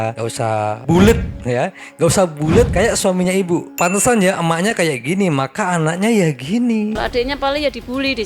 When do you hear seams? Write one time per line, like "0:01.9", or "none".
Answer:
0:03.7
0:07.0